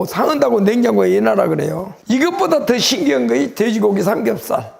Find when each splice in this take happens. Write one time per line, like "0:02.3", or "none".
0:01.9